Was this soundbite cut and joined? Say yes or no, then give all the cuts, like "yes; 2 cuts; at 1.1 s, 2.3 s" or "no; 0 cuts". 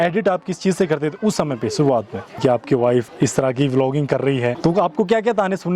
yes; 3 cuts; at 2.4 s, 3.1 s, 4.6 s